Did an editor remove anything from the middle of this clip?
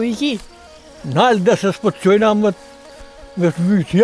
no; 0 cuts

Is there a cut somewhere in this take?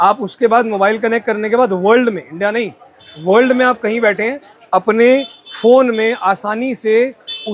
no; 0 cuts

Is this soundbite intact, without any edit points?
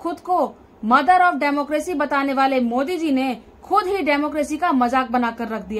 yes; 0 cuts

